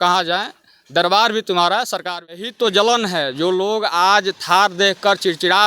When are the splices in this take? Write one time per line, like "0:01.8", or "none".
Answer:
0:02.4